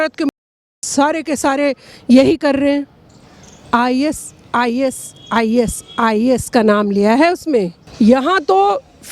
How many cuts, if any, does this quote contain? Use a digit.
1